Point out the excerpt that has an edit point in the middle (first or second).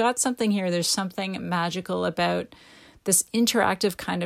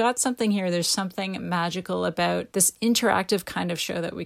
second